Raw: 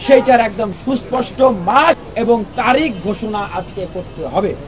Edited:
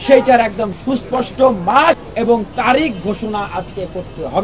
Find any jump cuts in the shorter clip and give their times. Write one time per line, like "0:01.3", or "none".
none